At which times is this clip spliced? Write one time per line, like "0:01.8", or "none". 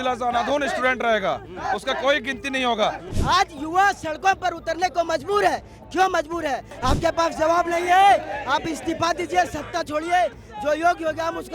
0:03.1
0:06.7